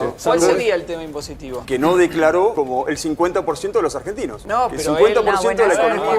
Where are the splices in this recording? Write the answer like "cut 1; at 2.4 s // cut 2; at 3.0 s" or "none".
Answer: cut 1; at 1.6 s // cut 2; at 2.5 s // cut 3; at 4.4 s

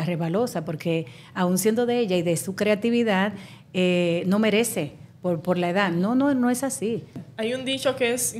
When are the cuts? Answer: cut 1; at 7.2 s

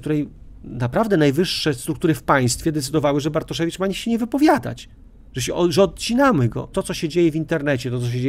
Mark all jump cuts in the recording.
cut 1; at 6.8 s

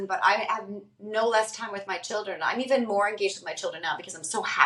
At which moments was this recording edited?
none

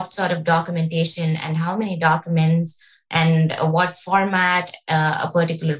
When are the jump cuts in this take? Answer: none

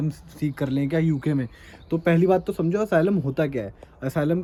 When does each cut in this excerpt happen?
none

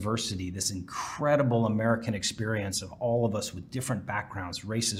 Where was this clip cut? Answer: none

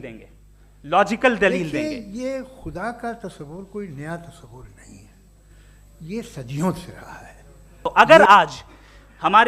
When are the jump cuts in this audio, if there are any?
cut 1; at 1.7 s // cut 2; at 7.6 s

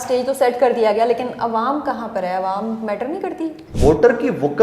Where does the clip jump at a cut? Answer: cut 1; at 3.6 s

